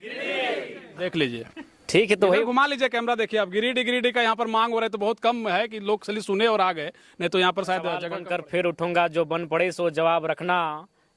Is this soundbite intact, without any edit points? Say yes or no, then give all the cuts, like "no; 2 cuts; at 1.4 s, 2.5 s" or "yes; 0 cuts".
no; 1 cut; at 8.1 s